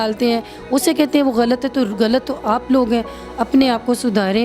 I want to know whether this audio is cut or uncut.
uncut